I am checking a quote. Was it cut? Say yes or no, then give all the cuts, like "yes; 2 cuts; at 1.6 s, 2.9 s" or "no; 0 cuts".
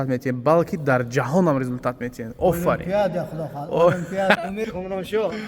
yes; 1 cut; at 4.4 s